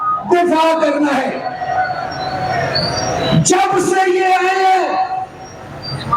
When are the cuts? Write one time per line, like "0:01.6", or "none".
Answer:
0:01.5